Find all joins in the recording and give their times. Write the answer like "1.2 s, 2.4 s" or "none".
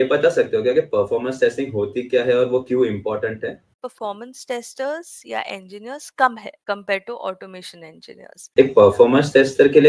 3.8 s, 6.5 s, 8.5 s